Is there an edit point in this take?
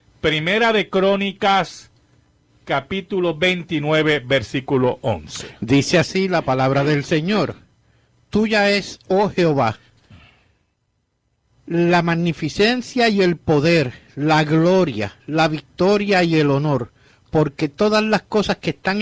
yes; 1 cut; at 12.5 s

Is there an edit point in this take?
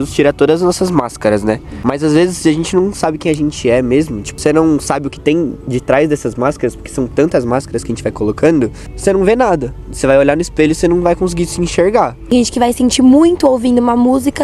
yes; 4 cuts; at 1.7 s, 4.4 s, 8.8 s, 12.3 s

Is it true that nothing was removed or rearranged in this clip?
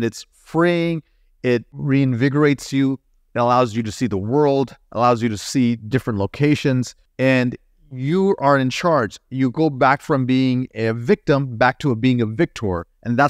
no; 2 cuts; at 1.8 s, 7.0 s

